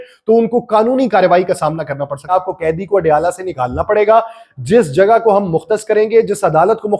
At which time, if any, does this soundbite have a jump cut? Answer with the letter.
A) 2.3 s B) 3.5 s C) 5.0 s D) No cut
A